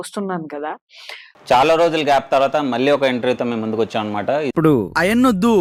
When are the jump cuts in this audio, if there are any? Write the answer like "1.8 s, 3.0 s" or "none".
none